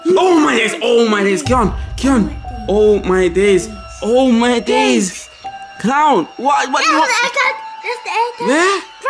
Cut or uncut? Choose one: uncut